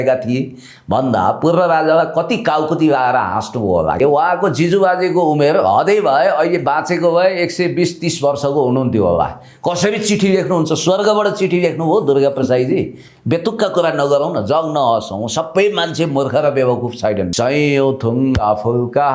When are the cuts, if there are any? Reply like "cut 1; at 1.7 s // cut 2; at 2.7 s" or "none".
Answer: cut 1; at 4.0 s // cut 2; at 17.3 s